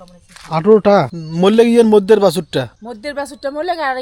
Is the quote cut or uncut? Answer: cut